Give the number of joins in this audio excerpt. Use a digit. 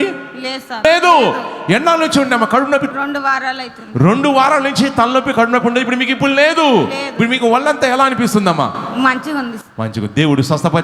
2